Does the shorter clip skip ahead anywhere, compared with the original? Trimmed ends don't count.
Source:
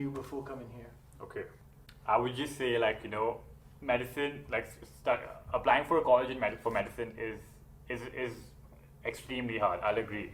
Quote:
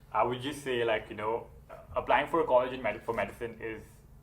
yes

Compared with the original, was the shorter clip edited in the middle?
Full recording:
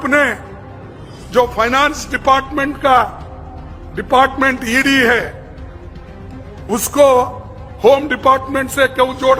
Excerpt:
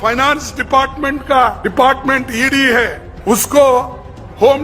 yes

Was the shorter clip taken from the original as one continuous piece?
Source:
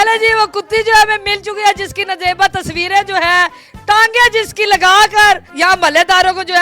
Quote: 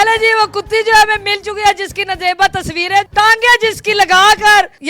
no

